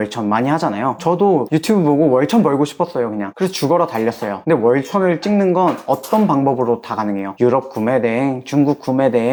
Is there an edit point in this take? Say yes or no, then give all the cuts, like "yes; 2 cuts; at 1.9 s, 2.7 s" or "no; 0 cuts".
no; 0 cuts